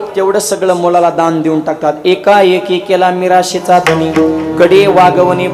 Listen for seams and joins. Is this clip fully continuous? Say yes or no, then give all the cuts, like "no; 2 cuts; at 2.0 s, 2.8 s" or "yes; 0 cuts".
yes; 0 cuts